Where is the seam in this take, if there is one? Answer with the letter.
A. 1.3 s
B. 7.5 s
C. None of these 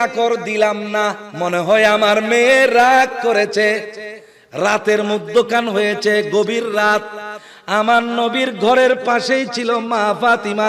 A